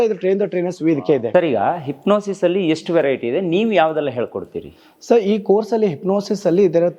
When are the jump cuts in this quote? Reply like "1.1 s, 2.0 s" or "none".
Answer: none